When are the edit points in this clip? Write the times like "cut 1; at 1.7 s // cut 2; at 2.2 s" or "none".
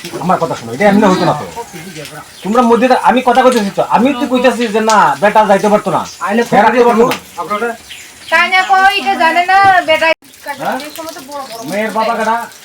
cut 1; at 10.3 s

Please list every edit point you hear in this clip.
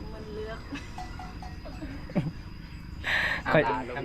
none

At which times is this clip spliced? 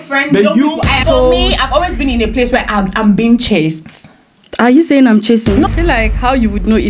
cut 1; at 1.0 s // cut 2; at 5.7 s

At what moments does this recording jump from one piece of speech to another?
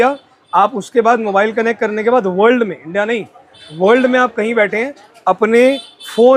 none

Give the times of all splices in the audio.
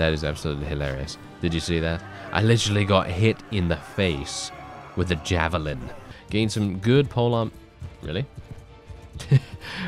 cut 1; at 6.1 s

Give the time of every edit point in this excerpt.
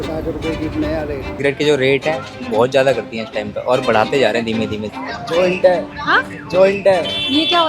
cut 1; at 1.3 s // cut 2; at 4.8 s

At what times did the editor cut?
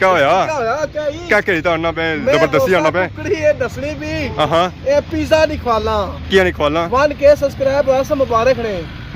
none

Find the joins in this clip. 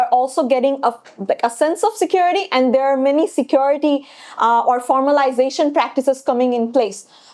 none

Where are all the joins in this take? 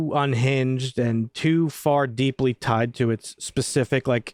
none

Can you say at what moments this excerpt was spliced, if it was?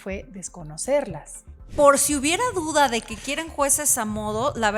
cut 1; at 1.7 s

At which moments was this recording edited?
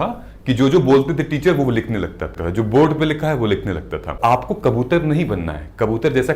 cut 1; at 2.3 s // cut 2; at 4.2 s

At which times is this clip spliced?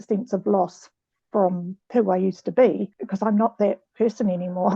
cut 1; at 1.7 s // cut 2; at 3.0 s

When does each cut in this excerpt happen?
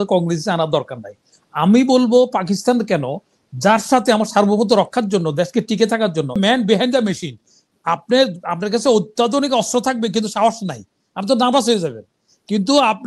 cut 1; at 6.4 s

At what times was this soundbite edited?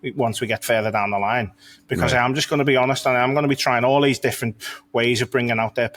none

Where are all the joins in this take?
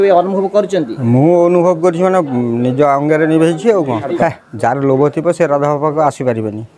cut 1; at 4.1 s

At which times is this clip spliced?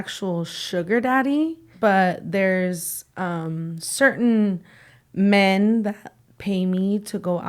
cut 1; at 1.6 s

